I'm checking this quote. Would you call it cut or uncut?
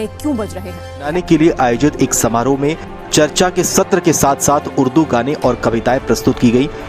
cut